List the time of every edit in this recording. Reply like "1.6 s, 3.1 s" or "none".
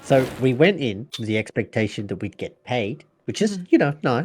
1.1 s